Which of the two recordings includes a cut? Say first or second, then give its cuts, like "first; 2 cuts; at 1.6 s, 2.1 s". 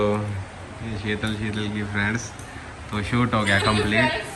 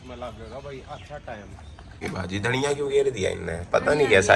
second; 1 cut; at 2.0 s